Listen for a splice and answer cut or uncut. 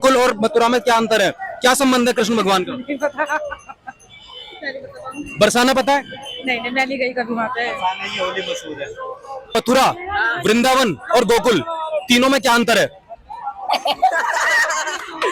uncut